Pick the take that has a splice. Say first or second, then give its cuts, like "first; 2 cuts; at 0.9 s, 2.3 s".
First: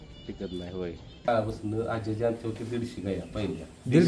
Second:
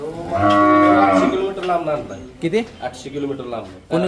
first; 1 cut; at 1.3 s